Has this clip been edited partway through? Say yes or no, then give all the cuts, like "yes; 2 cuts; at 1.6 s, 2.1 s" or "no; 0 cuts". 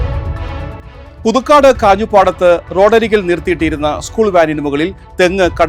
yes; 1 cut; at 0.9 s